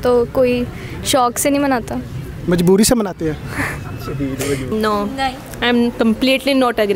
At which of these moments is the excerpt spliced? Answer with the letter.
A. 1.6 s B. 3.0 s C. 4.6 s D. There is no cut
C